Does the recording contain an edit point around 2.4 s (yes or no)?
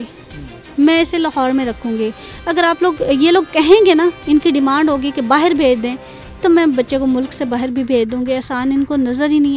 no